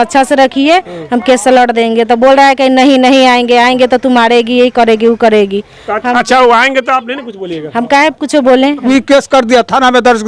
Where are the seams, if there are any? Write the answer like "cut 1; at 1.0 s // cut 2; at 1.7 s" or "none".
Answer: cut 1; at 8.8 s

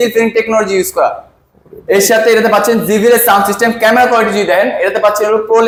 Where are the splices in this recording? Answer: none

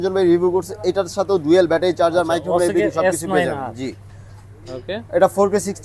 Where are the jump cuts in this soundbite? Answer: none

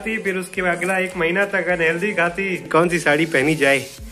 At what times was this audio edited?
cut 1; at 2.6 s

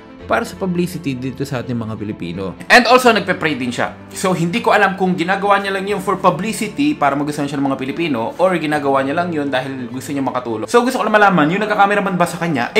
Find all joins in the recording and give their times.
cut 1; at 10.6 s

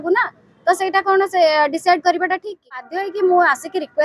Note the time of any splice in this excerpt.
cut 1; at 3.0 s

